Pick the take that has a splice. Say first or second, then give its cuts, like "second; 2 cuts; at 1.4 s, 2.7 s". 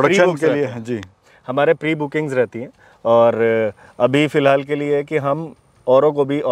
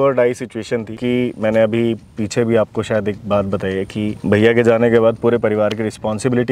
second; 2 cuts; at 0.9 s, 4.2 s